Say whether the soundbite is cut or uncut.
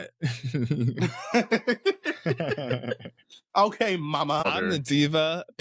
cut